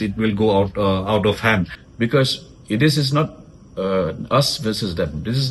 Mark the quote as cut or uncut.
cut